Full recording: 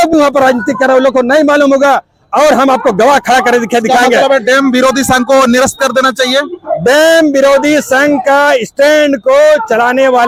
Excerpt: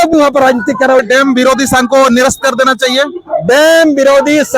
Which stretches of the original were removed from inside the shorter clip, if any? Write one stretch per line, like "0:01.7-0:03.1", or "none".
0:01.0-0:04.4